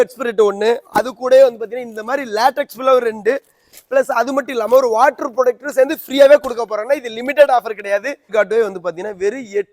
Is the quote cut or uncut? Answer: cut